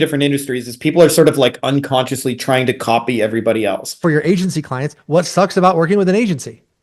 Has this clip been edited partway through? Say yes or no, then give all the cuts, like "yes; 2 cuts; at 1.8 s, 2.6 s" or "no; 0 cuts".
yes; 1 cut; at 4.0 s